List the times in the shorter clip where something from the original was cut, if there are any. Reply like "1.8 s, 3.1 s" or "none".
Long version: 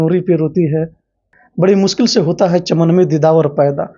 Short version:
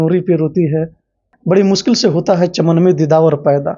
1.5 s